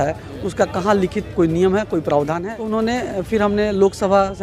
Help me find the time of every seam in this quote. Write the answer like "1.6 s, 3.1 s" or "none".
2.4 s

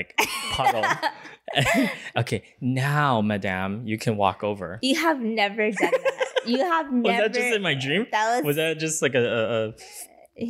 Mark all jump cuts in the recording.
none

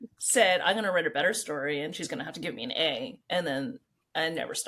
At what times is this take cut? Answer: none

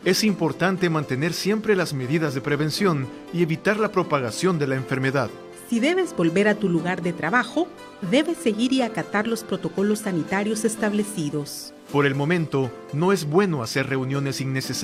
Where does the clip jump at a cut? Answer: none

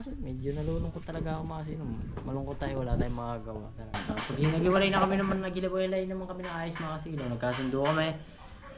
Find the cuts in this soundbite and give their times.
4.0 s

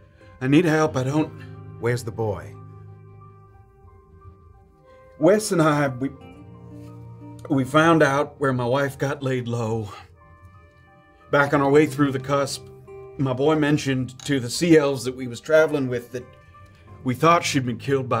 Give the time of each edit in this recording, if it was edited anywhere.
none

